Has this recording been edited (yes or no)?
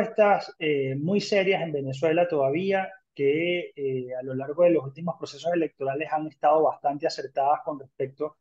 no